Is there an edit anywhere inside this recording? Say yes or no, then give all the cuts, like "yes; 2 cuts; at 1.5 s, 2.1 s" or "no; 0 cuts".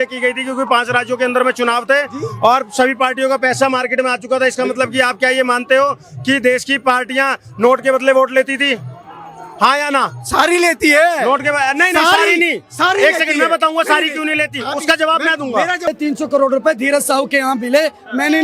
yes; 1 cut; at 15.8 s